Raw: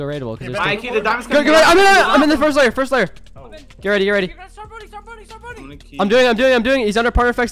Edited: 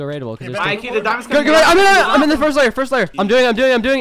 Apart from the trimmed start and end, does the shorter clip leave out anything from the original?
yes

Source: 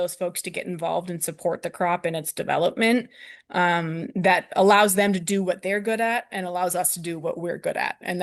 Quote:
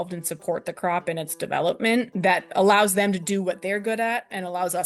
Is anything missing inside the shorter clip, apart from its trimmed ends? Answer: yes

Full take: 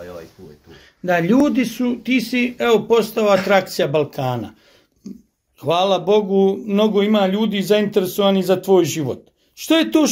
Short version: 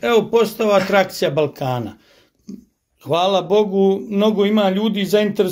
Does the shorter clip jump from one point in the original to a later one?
no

